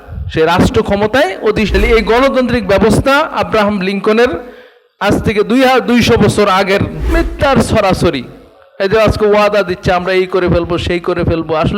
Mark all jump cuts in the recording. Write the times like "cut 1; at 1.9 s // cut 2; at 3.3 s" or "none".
cut 1; at 1.7 s // cut 2; at 7.0 s